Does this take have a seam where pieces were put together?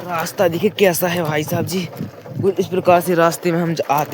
no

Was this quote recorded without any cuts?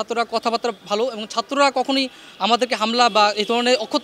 yes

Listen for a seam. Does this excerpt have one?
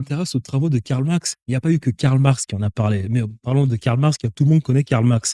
no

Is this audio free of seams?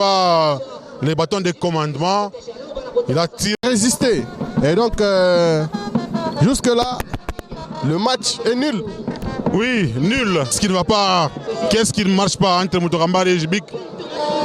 no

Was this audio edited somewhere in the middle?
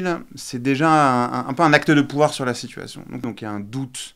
yes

